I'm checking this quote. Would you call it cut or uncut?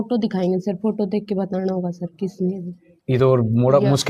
uncut